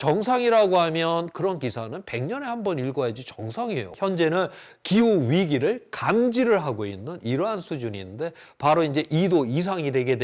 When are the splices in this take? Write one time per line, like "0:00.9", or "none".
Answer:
0:03.9